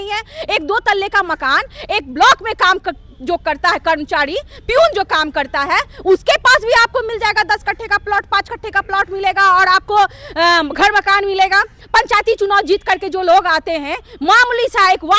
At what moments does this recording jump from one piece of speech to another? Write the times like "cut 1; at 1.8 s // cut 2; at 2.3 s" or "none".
none